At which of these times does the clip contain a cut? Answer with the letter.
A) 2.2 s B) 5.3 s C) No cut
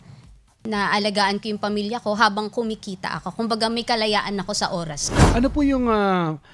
B